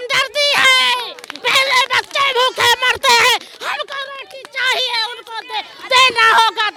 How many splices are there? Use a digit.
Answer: 0